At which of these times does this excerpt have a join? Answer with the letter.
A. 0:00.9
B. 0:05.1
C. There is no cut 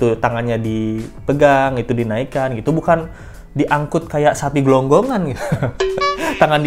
C